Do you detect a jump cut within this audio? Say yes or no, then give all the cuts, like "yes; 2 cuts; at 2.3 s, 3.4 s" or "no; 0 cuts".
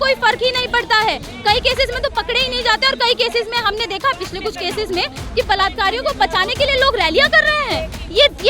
no; 0 cuts